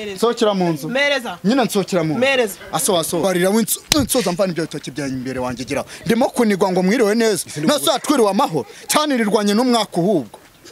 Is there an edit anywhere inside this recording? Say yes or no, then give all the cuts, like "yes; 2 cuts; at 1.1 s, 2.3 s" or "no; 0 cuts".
yes; 1 cut; at 3.2 s